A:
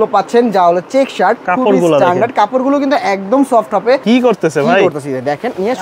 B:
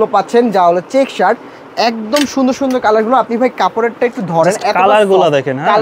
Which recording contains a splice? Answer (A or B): A